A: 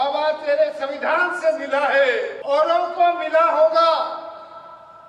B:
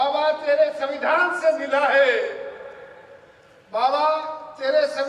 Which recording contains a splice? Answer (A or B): A